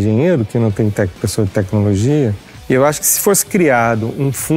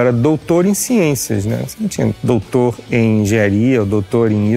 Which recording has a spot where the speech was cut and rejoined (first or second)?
first